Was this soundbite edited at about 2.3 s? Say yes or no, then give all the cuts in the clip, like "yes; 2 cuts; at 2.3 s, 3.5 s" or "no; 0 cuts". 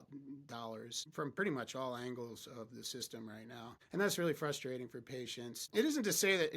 no; 3 cuts; at 1.0 s, 3.8 s, 5.7 s